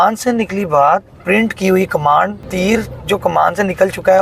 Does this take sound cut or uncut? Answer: cut